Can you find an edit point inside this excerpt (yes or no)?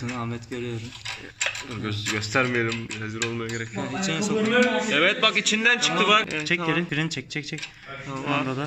no